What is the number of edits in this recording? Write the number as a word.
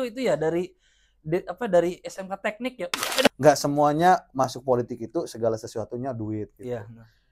one